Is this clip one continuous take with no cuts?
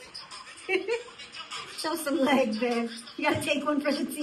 yes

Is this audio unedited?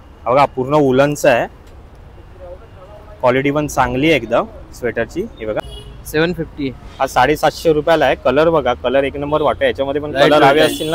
yes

